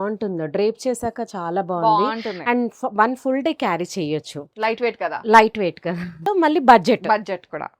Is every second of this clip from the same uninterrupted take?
no; 1 cut; at 6.2 s

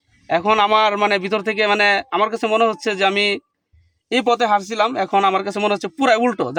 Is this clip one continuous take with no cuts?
yes; 0 cuts

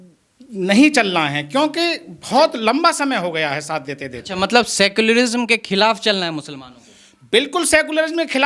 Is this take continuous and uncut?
yes; 0 cuts

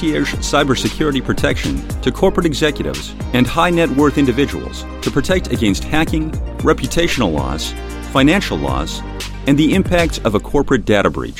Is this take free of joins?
yes; 0 cuts

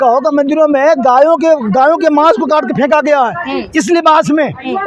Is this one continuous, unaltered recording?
yes; 0 cuts

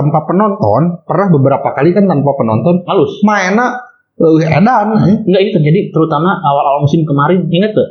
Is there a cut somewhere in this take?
no; 0 cuts

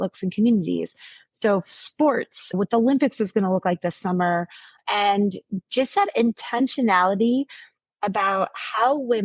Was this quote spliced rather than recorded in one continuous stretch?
yes; 1 cut; at 2.5 s

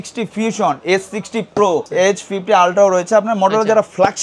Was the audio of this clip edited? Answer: yes; 1 cut; at 1.9 s

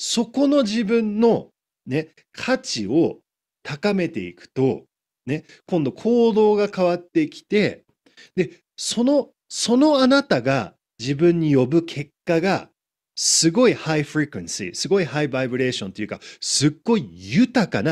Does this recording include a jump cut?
no; 0 cuts

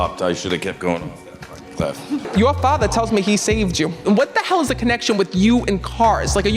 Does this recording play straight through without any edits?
no; 2 cuts; at 2.3 s, 4.0 s

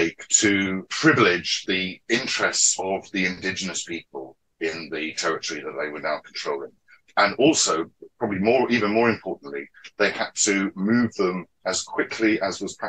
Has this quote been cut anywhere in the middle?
yes; 2 cuts; at 0.9 s, 1.5 s

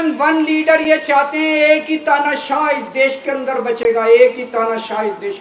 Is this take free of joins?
yes; 0 cuts

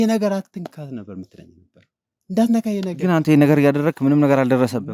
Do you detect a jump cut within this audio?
no; 0 cuts

